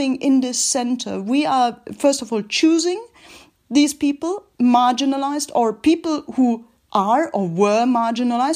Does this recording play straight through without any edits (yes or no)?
yes